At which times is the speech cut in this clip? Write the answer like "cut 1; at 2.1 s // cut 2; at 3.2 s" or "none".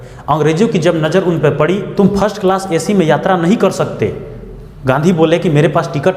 cut 1; at 2.0 s